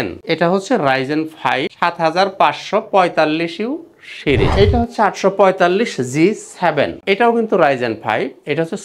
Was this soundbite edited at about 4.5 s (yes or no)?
yes